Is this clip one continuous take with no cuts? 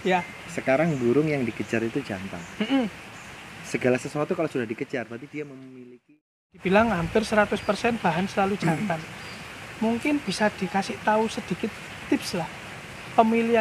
no; 1 cut; at 6.6 s

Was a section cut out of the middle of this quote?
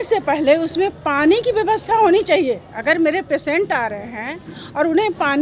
no; 0 cuts

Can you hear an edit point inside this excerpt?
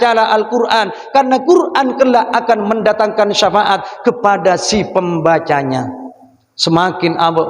no; 0 cuts

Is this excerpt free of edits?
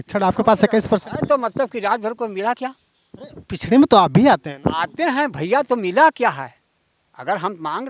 yes; 0 cuts

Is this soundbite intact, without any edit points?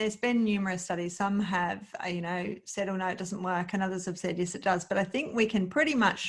yes; 0 cuts

